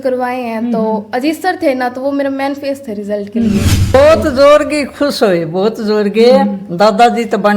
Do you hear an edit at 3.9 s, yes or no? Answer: yes